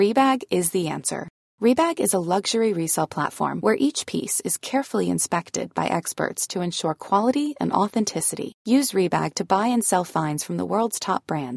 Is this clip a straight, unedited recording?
yes; 0 cuts

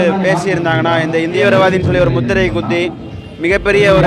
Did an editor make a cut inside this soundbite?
yes; 1 cut; at 1.4 s

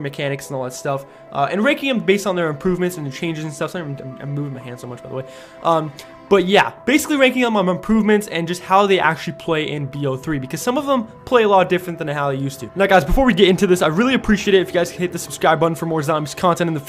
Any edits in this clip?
yes; 1 cut; at 5.0 s

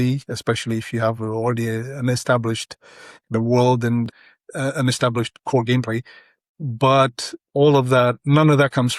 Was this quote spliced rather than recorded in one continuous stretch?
yes; 2 cuts; at 4.1 s, 6.4 s

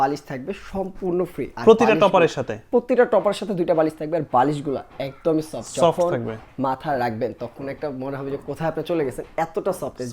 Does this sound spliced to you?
no; 0 cuts

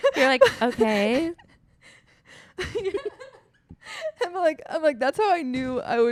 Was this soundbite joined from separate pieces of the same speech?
no; 0 cuts

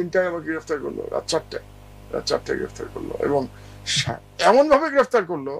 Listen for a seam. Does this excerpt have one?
no; 0 cuts

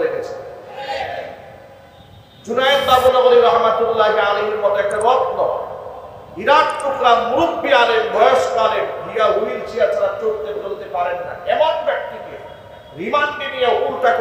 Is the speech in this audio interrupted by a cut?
no; 0 cuts

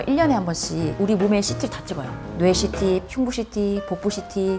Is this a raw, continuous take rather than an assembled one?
yes; 0 cuts

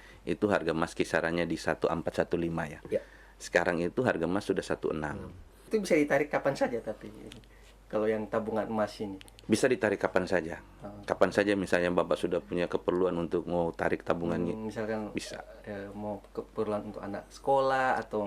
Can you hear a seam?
yes; 1 cut; at 5.6 s

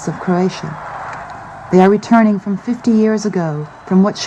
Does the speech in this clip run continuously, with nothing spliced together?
no; 1 cut; at 3.2 s

